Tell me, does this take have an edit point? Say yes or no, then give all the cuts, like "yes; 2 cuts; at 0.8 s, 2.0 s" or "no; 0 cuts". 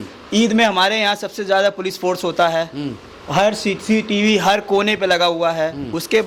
no; 0 cuts